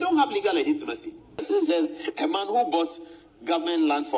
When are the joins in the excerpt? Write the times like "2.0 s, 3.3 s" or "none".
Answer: 1.4 s